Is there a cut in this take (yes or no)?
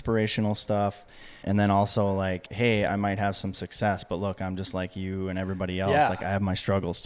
yes